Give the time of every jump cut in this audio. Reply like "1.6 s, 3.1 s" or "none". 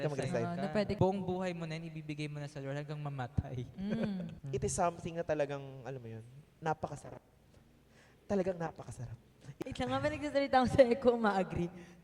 1.0 s, 4.4 s, 9.5 s